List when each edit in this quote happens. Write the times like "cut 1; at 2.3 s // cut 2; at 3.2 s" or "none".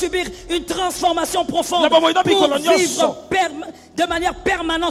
none